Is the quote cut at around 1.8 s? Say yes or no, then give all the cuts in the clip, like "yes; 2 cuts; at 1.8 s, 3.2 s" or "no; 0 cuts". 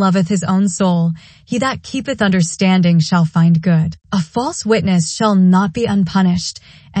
no; 1 cut; at 4.0 s